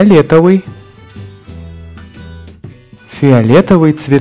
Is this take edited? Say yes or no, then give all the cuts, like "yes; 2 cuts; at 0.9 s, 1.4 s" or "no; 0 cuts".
no; 0 cuts